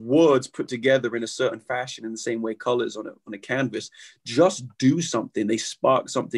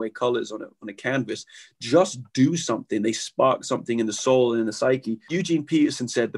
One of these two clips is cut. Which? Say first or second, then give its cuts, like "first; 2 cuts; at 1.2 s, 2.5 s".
second; 1 cut; at 5.3 s